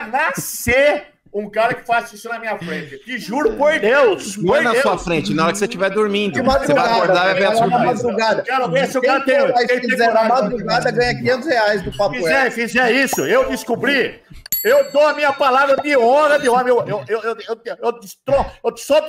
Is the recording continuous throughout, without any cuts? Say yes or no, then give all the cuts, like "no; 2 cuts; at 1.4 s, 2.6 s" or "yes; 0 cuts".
yes; 0 cuts